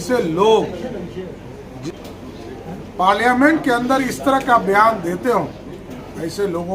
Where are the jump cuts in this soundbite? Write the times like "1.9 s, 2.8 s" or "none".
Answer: 1.8 s